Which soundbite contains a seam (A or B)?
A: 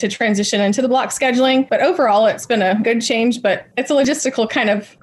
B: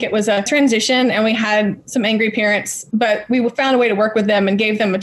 A